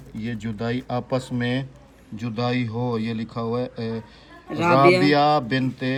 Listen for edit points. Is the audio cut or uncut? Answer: uncut